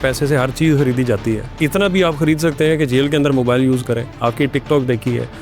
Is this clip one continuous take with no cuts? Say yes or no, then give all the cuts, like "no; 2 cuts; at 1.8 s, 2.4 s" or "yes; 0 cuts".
no; 1 cut; at 1.5 s